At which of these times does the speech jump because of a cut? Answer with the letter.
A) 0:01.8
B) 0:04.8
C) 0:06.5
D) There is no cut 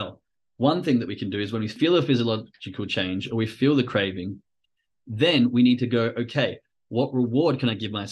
A